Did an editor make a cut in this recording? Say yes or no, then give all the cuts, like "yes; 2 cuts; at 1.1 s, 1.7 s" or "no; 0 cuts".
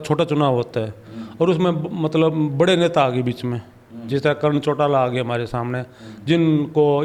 no; 0 cuts